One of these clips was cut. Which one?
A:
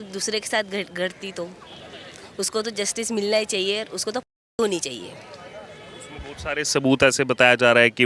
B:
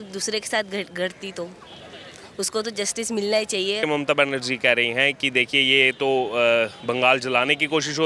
B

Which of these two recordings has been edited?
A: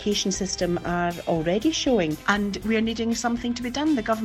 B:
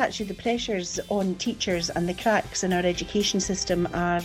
A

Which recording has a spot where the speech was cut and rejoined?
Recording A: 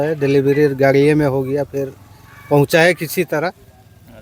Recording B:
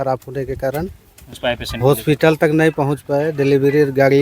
B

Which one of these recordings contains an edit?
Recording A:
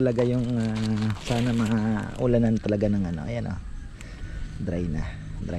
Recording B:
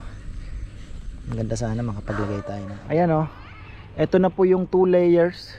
B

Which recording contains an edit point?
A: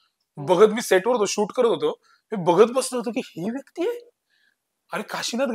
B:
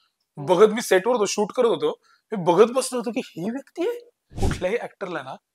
B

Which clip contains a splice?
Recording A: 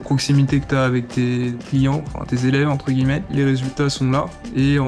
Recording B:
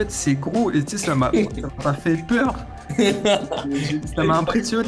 A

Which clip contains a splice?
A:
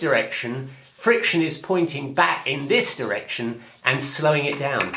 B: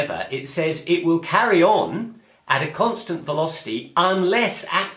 A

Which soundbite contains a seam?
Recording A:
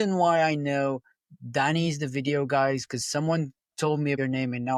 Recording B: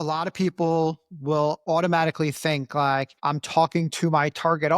B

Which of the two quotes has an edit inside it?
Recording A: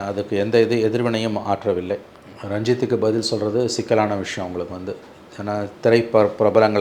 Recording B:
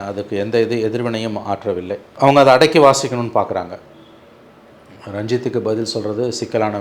A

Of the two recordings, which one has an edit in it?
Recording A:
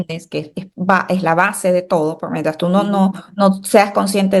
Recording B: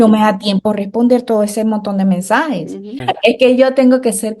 B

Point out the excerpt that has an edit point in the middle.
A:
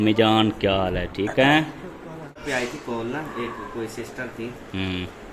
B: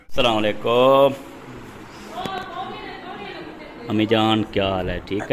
A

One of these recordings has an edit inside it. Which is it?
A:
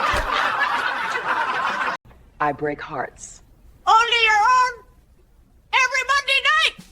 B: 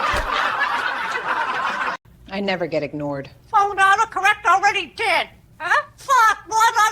A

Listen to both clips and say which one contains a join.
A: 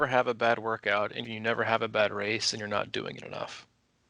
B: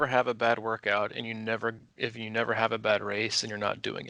A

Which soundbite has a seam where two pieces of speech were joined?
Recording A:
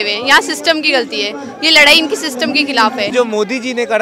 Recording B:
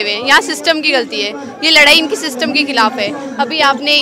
A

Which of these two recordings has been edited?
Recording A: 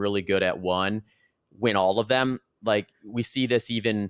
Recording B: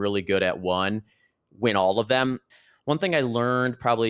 B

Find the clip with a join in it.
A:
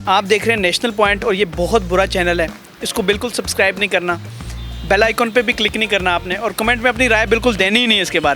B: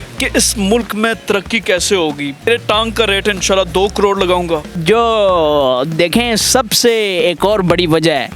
B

